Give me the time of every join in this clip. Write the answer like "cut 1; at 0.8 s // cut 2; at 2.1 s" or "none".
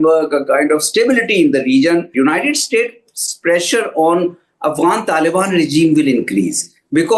cut 1; at 2.1 s

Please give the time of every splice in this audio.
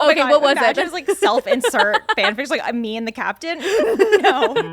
none

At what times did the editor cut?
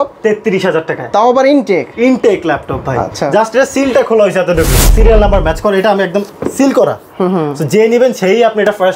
cut 1; at 4.9 s

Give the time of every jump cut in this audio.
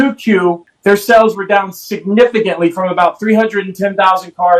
none

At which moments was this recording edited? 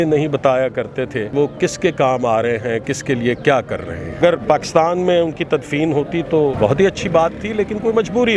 cut 1; at 1.3 s // cut 2; at 4.2 s // cut 3; at 6.6 s

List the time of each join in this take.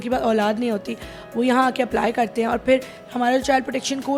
none

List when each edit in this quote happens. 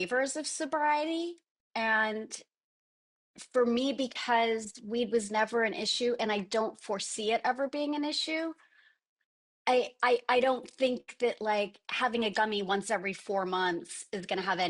none

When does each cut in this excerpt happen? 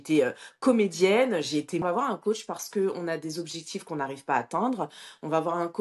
cut 1; at 1.8 s

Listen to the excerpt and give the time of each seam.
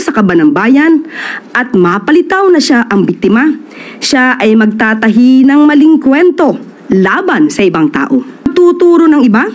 cut 1; at 8.5 s

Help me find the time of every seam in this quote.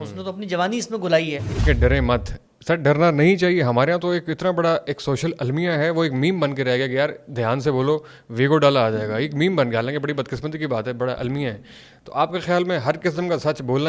cut 1; at 1.6 s

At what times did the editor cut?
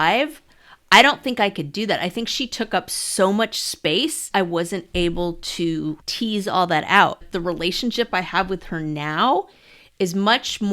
cut 1; at 4.2 s // cut 2; at 6.1 s // cut 3; at 7.2 s

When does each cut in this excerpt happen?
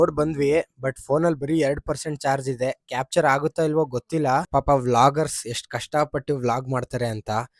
cut 1; at 4.5 s

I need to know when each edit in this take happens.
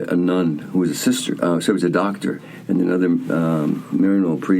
cut 1; at 2.4 s

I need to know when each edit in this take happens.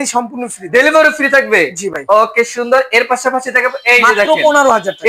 none

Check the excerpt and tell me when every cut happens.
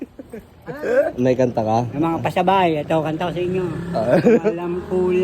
cut 1; at 1.1 s

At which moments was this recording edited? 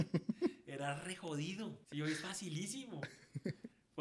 cut 1; at 1.8 s

